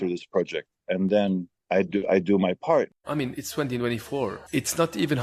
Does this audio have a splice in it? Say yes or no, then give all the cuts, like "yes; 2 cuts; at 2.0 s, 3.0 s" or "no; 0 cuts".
yes; 3 cuts; at 1.5 s, 3.0 s, 4.4 s